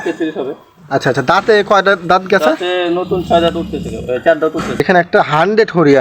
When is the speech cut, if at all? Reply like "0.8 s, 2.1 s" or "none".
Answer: 4.8 s